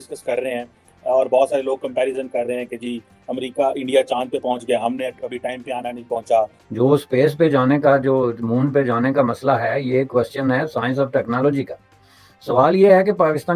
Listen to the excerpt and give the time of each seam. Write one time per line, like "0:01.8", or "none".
0:06.6